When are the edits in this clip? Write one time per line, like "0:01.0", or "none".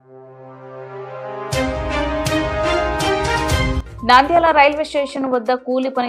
none